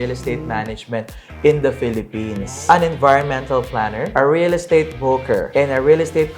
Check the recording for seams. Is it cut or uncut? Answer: cut